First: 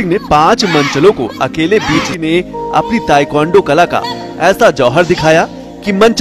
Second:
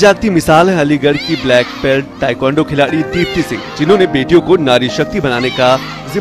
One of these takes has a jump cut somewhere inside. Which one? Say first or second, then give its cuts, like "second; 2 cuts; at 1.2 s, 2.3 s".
first; 1 cut; at 2.1 s